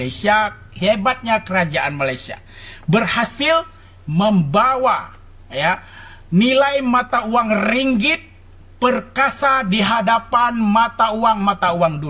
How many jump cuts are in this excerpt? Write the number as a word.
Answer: zero